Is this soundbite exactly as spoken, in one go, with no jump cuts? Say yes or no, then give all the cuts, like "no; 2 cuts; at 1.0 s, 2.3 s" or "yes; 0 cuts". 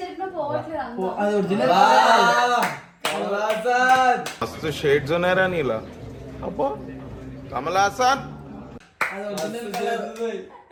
yes; 0 cuts